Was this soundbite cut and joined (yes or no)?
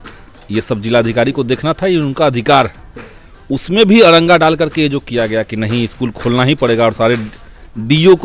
no